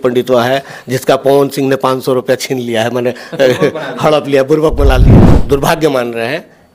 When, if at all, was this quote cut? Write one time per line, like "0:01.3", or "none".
0:05.3